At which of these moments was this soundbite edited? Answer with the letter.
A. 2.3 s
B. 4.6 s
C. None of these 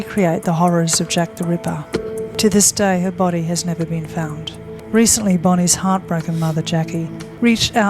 A